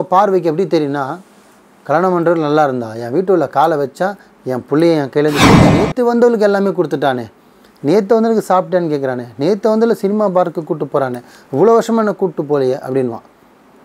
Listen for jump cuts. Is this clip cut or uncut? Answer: cut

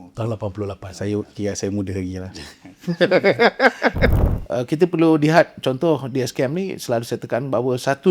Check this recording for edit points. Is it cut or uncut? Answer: cut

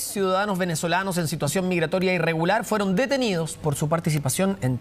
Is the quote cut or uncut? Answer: uncut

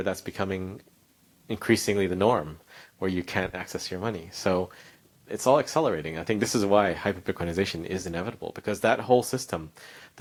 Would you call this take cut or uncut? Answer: uncut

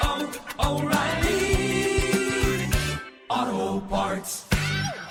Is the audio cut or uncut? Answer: uncut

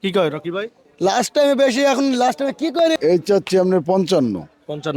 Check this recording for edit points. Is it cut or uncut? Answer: cut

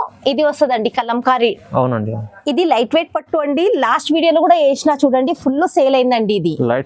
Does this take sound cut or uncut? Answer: cut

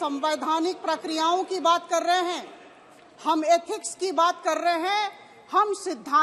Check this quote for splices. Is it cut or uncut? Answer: uncut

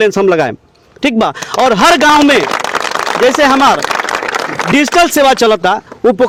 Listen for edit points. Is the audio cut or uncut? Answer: uncut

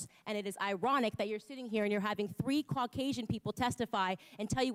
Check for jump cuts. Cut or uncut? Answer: uncut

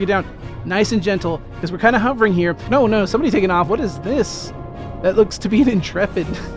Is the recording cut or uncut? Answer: cut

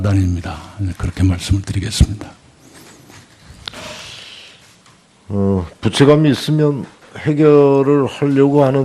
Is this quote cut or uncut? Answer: cut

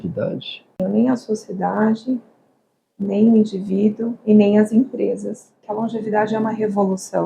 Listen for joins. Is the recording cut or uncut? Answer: cut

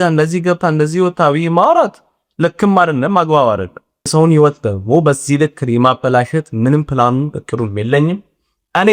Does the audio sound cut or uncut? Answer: cut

